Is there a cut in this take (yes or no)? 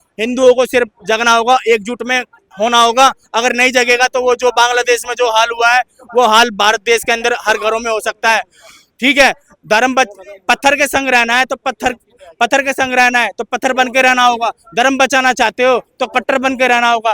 no